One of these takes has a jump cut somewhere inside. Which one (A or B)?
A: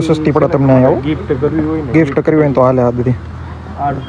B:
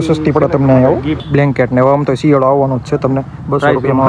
B